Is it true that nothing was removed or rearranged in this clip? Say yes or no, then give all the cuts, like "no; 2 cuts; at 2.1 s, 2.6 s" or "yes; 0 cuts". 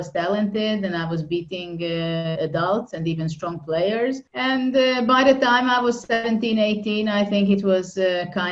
no; 1 cut; at 4.3 s